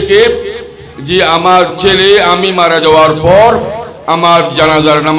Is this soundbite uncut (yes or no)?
yes